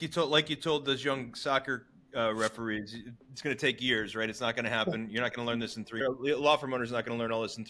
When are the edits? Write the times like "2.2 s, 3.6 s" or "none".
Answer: 6.0 s